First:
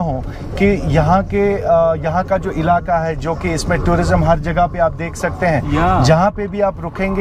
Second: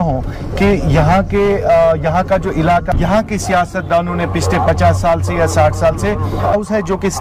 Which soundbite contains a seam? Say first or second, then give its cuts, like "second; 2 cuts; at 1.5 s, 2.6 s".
second; 2 cuts; at 2.9 s, 6.5 s